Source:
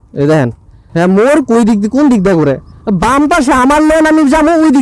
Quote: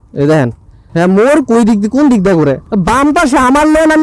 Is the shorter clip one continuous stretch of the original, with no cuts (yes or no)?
no